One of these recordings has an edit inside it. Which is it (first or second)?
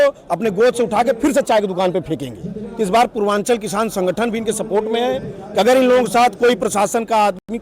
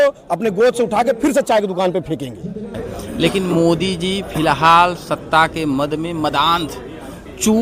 second